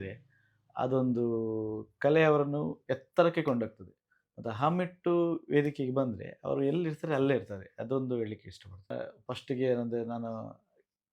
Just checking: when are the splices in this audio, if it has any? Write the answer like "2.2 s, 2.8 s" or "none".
8.9 s